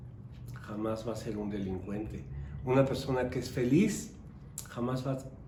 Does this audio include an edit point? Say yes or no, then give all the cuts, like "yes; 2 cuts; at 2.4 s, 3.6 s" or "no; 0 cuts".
no; 0 cuts